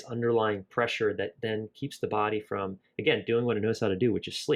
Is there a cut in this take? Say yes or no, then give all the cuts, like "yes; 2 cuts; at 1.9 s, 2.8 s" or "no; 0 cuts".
no; 0 cuts